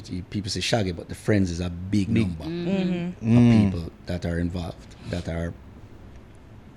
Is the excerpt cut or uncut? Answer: uncut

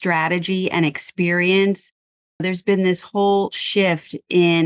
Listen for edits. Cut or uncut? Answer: uncut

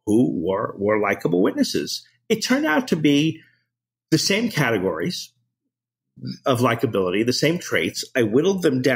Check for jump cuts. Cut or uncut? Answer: uncut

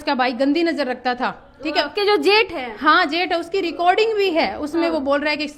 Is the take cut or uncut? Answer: uncut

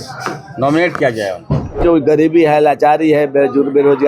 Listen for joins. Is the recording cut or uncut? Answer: cut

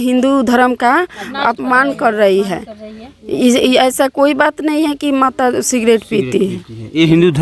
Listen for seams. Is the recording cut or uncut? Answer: uncut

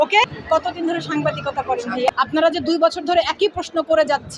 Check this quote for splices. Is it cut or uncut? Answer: cut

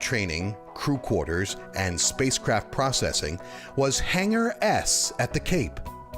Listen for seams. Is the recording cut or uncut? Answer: cut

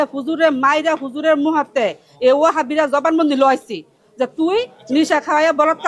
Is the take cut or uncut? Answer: uncut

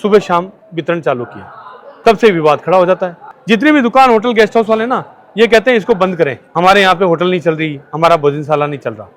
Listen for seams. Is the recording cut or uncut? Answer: uncut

